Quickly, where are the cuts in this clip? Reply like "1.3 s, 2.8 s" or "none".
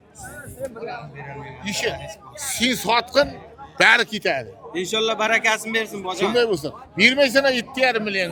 none